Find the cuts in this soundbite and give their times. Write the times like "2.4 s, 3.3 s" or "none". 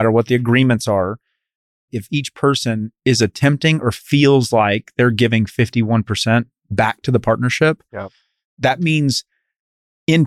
1.9 s

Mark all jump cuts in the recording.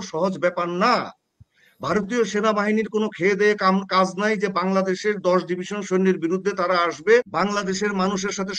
7.3 s

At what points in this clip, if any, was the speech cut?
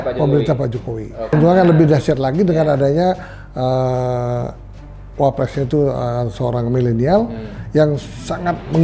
1.3 s

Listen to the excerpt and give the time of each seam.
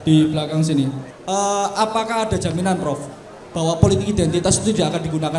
1.1 s

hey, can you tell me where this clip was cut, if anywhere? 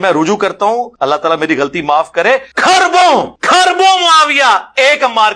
0.9 s, 2.5 s, 3.4 s

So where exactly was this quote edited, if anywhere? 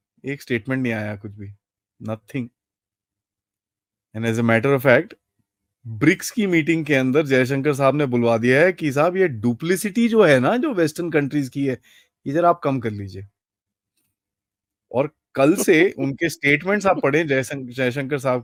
none

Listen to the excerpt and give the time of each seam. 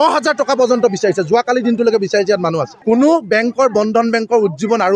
2.7 s

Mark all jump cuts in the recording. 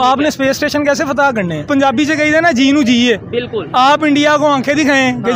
1.7 s

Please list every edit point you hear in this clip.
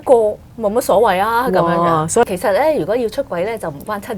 2.2 s

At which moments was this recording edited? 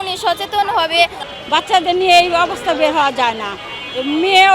1.2 s

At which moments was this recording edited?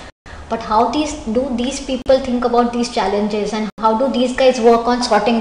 3.7 s

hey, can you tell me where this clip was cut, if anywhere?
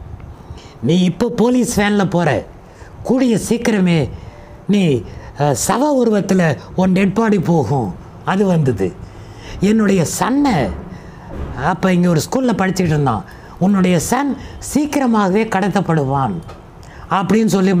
none

